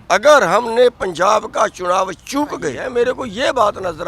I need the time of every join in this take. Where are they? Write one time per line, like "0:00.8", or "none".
0:02.8